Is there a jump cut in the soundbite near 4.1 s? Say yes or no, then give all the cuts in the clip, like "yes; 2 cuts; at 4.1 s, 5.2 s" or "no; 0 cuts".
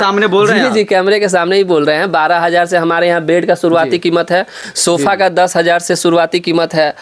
no; 0 cuts